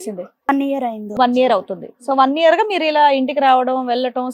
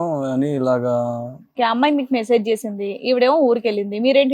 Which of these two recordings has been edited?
second; 1 cut; at 1.5 s

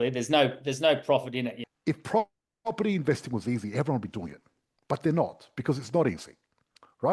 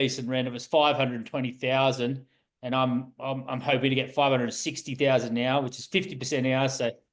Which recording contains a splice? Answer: first; 1 cut; at 1.6 s

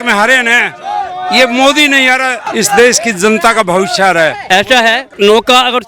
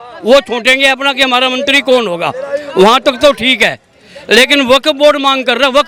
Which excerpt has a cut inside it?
first; 2 cuts; at 2.5 s, 4.9 s

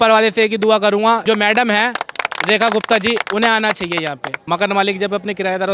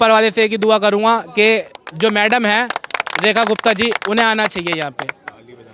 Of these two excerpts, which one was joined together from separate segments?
first; 2 cuts; at 1.2 s, 4.3 s

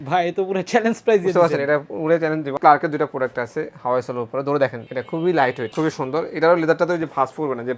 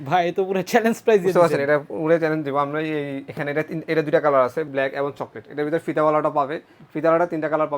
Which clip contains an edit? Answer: first; 3 cuts; at 2.6 s, 4.9 s, 5.7 s

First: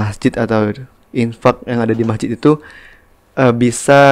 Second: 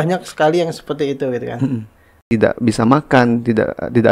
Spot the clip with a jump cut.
second; 1 cut; at 2.3 s

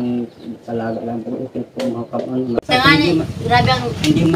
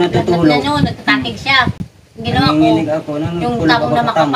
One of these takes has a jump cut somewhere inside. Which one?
first; 1 cut; at 2.6 s

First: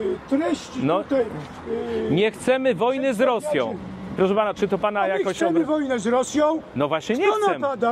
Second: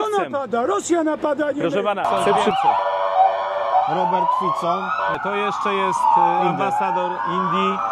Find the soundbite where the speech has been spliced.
second; 2 cuts; at 2.3 s, 5.2 s

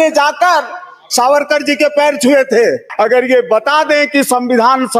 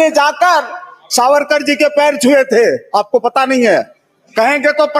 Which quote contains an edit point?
first; 1 cut; at 2.8 s

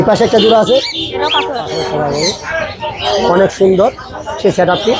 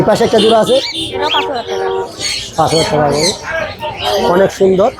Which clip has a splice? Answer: first; 1 cut; at 1.8 s

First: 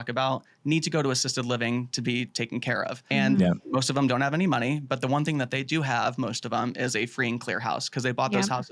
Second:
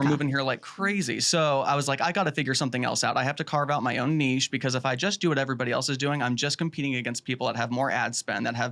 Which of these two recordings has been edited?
first; 1 cut; at 3.0 s

